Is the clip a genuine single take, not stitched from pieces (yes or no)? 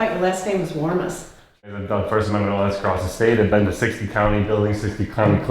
no